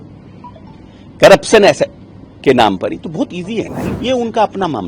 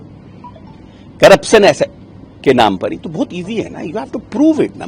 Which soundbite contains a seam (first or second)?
first